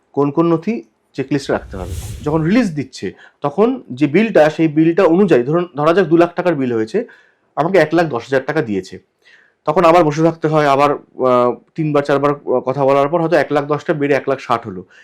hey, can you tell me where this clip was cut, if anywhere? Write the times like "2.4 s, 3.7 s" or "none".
1.9 s